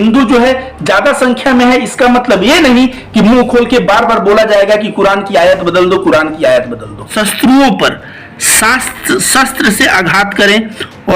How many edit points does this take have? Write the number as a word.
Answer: one